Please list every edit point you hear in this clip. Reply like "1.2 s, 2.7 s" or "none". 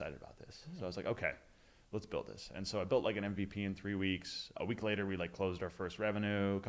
4.5 s